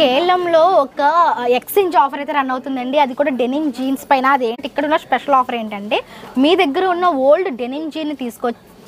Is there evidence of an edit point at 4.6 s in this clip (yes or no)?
yes